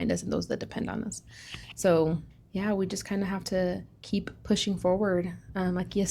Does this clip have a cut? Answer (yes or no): yes